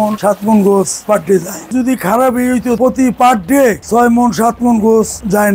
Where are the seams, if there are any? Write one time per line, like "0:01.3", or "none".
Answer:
0:01.7
0:02.8